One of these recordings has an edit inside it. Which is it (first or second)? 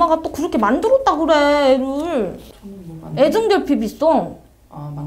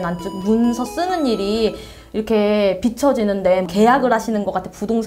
first